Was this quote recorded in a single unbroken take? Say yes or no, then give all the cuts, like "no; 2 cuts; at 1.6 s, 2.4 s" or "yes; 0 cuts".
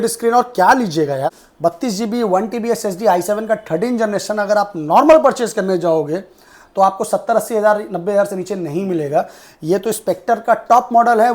no; 1 cut; at 1.5 s